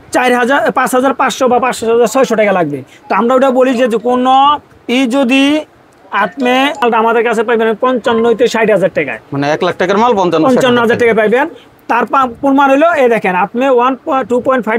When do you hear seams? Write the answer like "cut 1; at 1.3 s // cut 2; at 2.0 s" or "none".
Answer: none